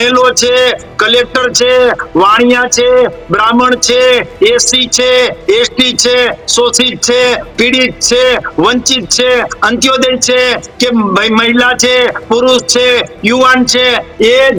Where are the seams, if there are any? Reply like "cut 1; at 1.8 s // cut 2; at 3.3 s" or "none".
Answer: none